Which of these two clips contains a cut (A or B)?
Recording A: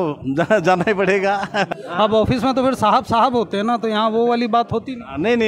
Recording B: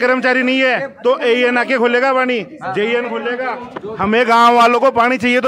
A